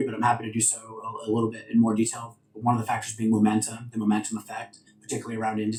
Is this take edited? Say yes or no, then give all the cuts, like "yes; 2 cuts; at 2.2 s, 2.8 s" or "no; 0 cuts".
no; 0 cuts